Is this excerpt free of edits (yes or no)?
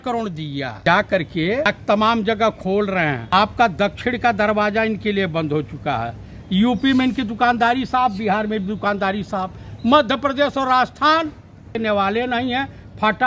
no